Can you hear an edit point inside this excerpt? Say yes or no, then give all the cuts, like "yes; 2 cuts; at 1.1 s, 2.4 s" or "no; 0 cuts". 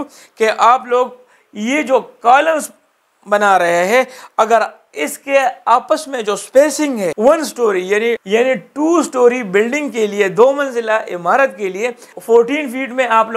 yes; 1 cut; at 7.1 s